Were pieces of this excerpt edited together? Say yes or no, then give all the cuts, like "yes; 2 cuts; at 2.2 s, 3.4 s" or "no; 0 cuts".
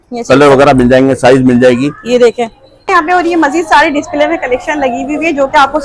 yes; 1 cut; at 2.9 s